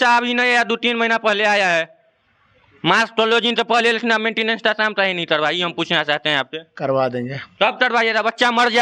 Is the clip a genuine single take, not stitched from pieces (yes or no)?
yes